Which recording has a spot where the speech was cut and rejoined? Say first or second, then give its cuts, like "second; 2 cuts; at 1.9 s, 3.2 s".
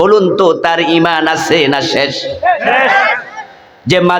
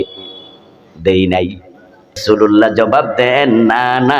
second; 1 cut; at 2.2 s